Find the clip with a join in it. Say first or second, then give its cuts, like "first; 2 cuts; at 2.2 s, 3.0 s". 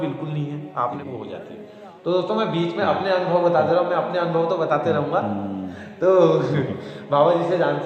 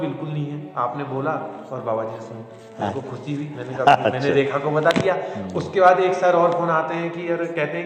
first; 1 cut; at 1.0 s